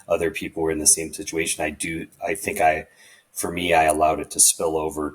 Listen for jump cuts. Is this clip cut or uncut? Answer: uncut